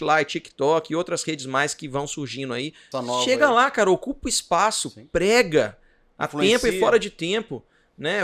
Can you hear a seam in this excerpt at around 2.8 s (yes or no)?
yes